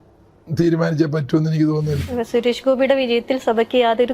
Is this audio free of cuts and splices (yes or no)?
no